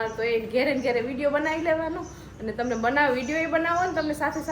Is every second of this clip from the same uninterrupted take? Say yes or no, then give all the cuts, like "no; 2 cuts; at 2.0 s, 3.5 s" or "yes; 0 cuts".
yes; 0 cuts